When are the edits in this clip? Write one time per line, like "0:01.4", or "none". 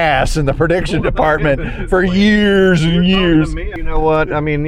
0:03.7